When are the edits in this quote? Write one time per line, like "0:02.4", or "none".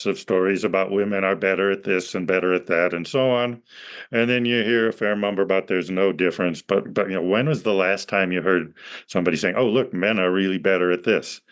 none